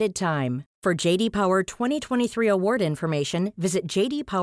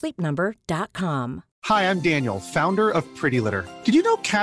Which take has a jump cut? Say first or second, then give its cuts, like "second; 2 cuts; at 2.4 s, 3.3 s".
second; 1 cut; at 1.5 s